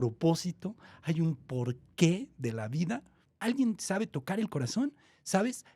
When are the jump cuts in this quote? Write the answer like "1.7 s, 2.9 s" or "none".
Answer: 3.3 s